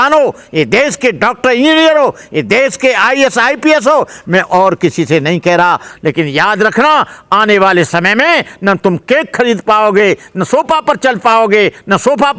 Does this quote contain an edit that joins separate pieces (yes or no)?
yes